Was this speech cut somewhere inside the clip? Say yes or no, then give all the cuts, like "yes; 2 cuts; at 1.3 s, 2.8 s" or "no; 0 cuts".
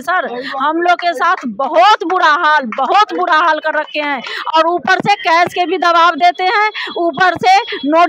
no; 0 cuts